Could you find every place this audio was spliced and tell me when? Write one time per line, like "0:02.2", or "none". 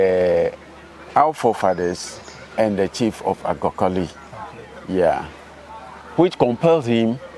none